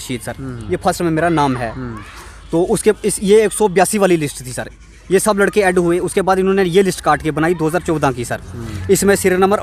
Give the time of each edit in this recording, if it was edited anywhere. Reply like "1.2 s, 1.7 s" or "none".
none

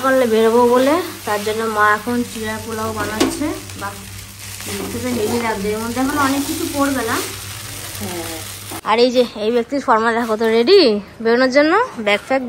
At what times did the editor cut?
8.7 s

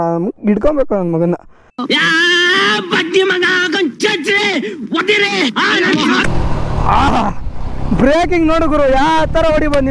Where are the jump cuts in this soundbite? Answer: 6.3 s

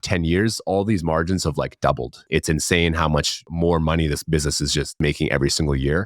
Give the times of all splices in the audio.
2.2 s, 3.4 s, 5.0 s

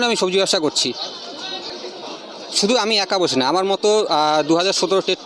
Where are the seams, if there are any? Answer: 1.7 s

